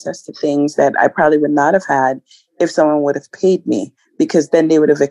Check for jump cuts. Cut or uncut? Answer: uncut